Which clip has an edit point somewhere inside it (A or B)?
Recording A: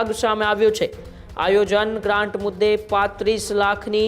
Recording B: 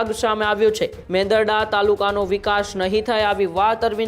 B